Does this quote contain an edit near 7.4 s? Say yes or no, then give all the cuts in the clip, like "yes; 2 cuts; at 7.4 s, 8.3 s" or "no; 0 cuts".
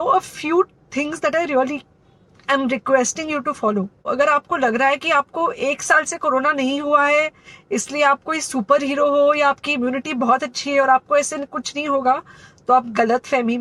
no; 1 cut; at 4.1 s